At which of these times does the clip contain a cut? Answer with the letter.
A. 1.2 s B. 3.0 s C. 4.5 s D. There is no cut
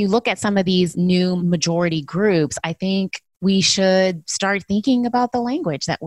A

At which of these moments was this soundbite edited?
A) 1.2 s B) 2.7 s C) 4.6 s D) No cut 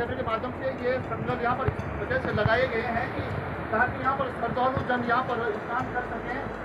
D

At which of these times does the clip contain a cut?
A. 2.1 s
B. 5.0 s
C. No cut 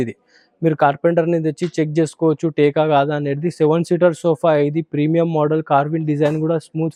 C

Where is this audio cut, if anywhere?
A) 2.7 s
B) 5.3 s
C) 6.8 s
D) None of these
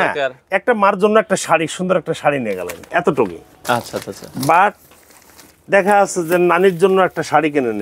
D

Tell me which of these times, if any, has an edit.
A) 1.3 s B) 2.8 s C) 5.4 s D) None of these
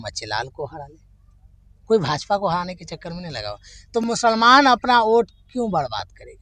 D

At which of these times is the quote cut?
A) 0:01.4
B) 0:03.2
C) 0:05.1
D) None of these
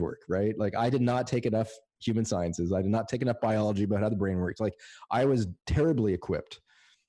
D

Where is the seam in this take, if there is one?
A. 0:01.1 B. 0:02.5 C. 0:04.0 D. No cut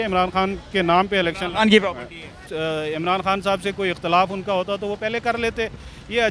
B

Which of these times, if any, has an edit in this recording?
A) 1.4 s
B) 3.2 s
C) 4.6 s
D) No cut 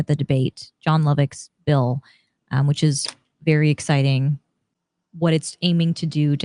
C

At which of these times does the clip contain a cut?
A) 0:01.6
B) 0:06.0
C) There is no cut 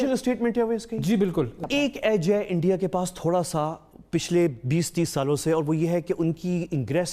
A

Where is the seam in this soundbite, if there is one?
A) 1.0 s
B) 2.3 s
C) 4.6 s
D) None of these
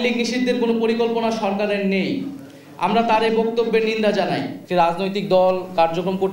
C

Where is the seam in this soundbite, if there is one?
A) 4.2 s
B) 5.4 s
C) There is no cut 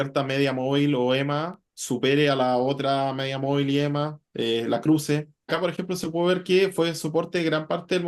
B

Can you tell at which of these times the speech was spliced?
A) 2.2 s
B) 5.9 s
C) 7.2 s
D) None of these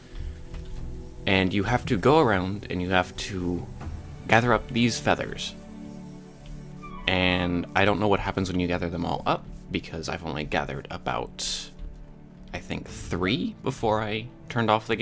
B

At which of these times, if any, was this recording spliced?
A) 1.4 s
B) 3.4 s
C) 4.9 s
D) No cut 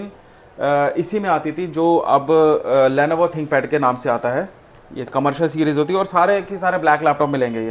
D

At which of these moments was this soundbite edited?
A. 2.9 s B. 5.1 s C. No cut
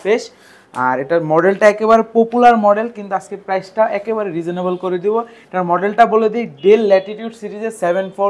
C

